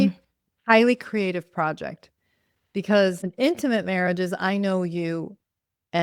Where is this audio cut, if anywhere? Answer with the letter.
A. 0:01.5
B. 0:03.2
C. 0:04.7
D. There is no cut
B